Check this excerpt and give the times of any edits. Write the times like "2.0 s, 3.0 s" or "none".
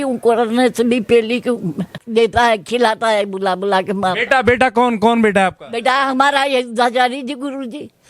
2.0 s